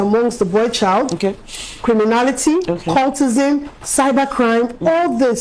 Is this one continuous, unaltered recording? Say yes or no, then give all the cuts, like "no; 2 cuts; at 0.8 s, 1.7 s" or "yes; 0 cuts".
yes; 0 cuts